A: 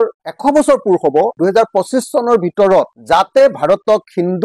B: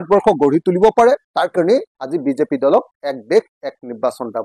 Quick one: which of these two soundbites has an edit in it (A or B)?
A